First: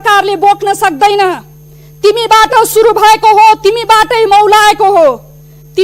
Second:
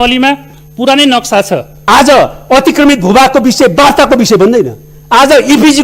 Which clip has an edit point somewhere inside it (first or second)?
second